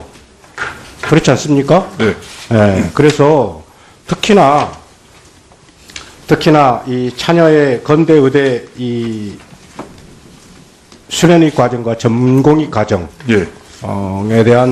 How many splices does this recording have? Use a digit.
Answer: 0